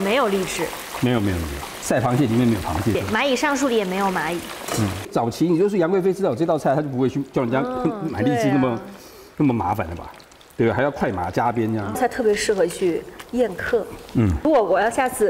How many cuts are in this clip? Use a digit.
5